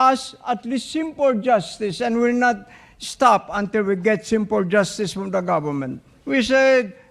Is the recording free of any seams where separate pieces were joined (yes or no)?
no